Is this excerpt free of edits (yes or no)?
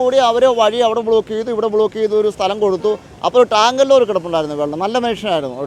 yes